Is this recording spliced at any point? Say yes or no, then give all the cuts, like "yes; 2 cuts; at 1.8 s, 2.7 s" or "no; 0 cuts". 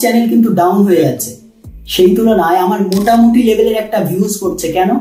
no; 0 cuts